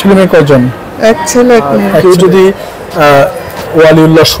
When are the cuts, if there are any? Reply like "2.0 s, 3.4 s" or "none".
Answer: 2.0 s